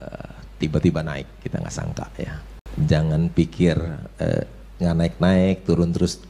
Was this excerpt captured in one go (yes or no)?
no